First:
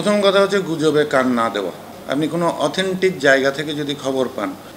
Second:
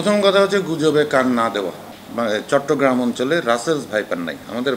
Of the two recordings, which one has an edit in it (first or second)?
second